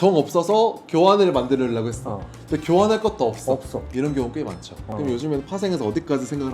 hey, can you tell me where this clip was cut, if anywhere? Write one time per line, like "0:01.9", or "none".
0:04.8